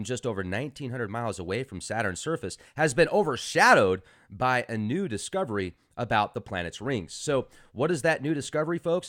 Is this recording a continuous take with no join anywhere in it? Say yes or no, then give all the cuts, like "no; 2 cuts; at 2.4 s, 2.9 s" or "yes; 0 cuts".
no; 1 cut; at 6.9 s